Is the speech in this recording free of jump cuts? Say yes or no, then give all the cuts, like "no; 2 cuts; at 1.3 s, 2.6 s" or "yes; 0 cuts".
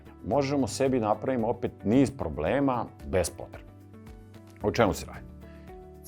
yes; 0 cuts